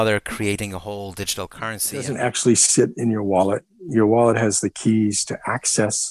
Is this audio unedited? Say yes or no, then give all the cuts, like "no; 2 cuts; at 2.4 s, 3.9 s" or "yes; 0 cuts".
no; 1 cut; at 2.0 s